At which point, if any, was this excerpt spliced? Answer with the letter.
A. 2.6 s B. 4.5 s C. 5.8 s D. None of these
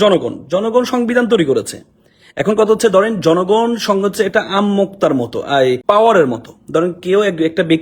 C